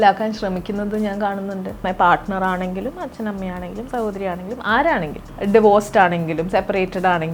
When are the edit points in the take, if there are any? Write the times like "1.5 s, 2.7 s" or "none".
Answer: 1.8 s, 5.2 s